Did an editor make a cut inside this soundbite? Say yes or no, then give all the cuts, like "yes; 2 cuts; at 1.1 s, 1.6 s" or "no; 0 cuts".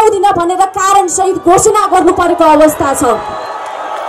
no; 0 cuts